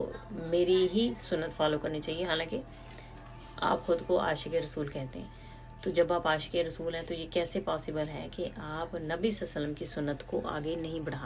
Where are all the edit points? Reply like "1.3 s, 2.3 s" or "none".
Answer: none

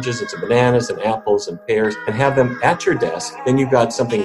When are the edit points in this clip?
2.0 s, 3.3 s

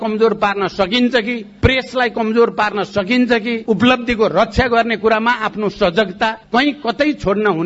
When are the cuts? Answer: 3.6 s

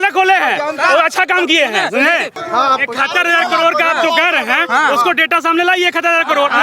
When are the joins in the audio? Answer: 2.4 s

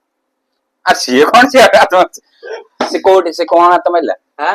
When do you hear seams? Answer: none

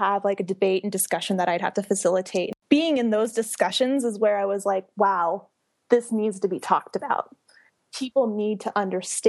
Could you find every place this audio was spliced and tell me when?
2.5 s

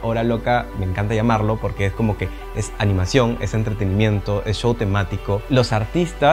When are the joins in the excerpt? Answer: 5.4 s

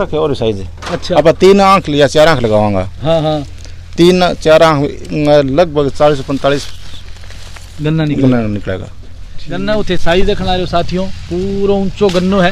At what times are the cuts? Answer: 9.6 s

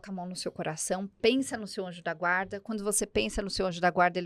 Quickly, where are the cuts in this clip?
none

